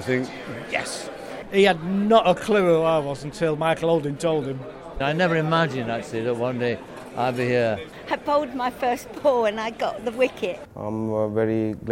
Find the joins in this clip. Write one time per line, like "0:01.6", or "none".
0:01.4
0:05.0
0:07.9
0:10.6